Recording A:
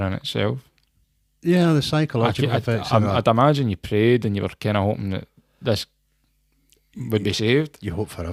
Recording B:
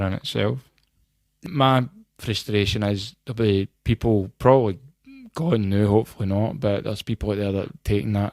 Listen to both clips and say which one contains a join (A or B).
B